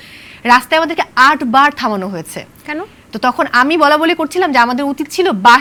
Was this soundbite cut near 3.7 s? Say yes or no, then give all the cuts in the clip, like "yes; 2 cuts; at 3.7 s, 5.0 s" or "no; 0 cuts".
no; 0 cuts